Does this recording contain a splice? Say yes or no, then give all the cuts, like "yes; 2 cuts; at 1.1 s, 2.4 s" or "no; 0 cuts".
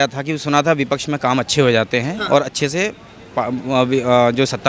no; 0 cuts